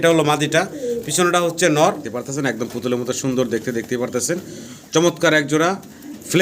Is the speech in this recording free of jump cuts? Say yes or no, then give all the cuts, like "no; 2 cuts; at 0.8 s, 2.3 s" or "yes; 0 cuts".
no; 1 cut; at 2.1 s